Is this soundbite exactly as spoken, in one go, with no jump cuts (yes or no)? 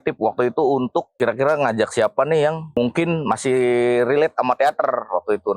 no